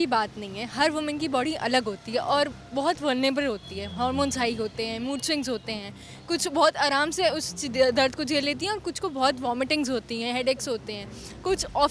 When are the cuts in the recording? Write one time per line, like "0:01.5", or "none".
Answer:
none